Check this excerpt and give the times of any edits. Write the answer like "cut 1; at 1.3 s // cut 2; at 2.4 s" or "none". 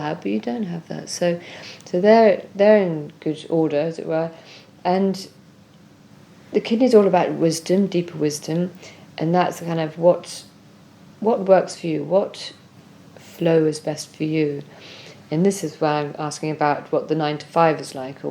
none